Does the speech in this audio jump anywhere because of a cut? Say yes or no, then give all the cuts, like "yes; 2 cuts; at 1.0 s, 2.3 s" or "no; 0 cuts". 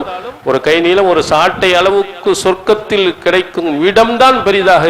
no; 0 cuts